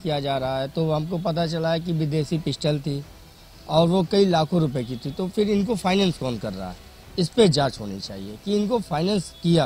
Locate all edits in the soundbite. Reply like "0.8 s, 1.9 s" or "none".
none